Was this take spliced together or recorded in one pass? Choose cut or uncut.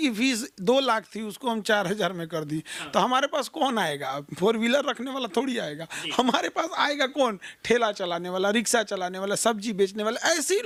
uncut